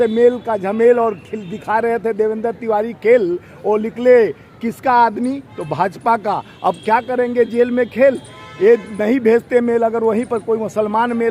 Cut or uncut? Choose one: uncut